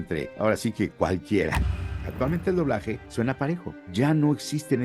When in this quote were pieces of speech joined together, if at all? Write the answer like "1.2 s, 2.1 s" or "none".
1.8 s, 3.0 s, 3.8 s